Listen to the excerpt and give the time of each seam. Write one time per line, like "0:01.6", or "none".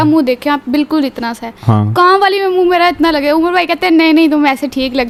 none

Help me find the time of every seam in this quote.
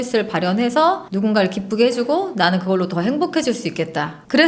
0:01.1

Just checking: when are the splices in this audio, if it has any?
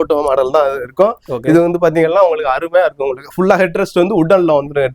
none

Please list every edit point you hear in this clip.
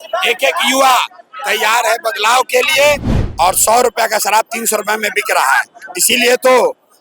0:03.2

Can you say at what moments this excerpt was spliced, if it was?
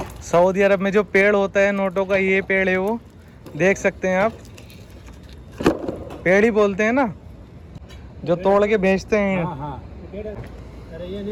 none

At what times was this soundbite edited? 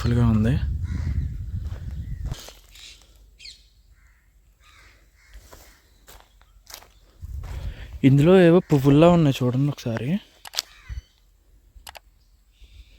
0:02.3
0:07.2

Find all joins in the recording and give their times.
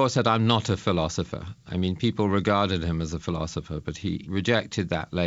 0:01.6
0:04.1

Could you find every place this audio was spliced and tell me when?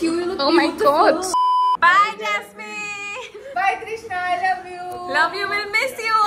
0:01.4

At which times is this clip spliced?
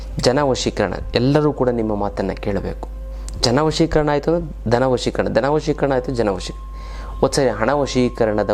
none

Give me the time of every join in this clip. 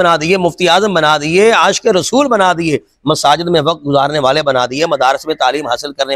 none

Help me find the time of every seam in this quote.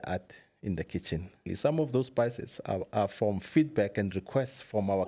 0:01.5

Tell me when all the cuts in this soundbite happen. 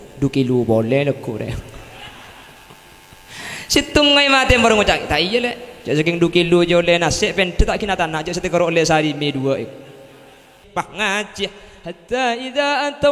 0:10.6

